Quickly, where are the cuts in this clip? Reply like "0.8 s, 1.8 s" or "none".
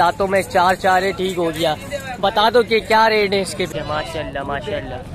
3.7 s